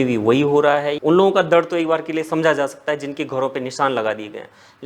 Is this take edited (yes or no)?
yes